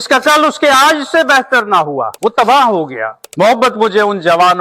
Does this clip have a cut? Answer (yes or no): yes